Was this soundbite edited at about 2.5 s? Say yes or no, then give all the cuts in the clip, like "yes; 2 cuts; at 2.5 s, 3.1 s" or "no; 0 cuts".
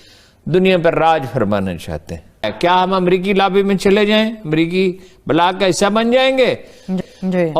yes; 1 cut; at 2.5 s